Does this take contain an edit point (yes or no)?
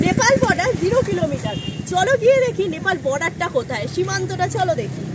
no